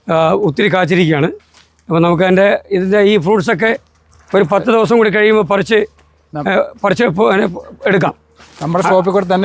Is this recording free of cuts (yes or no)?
yes